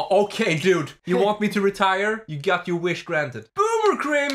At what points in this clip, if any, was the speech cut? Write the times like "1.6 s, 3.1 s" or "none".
0.9 s, 2.3 s, 3.4 s